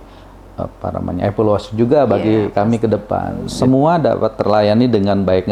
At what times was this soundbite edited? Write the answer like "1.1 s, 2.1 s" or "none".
3.3 s